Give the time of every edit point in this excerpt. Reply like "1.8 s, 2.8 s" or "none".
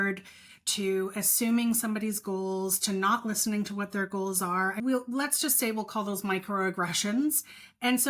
4.8 s